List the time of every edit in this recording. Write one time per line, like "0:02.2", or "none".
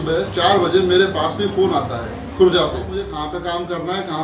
0:03.1

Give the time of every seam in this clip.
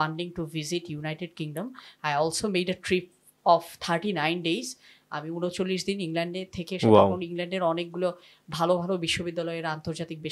none

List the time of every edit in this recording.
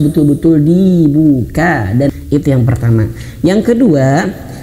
0:02.1

